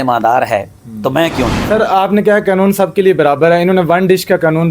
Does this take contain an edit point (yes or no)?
yes